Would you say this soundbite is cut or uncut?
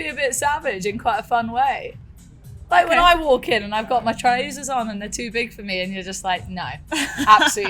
uncut